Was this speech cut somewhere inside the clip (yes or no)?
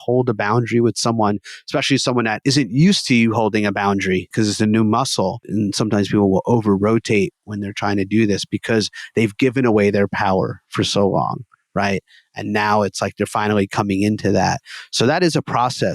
yes